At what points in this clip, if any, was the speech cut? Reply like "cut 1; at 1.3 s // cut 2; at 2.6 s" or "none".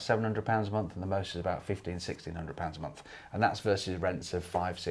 none